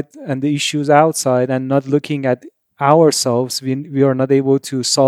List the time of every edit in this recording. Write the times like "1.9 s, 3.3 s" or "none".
none